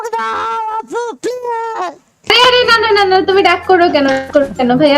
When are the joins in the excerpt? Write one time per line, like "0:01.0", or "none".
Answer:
0:02.3